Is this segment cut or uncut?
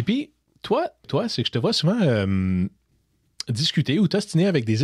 cut